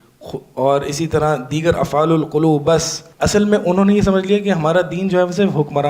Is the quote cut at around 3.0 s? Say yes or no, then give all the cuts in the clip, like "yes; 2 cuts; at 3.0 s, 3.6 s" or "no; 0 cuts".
yes; 1 cut; at 3.0 s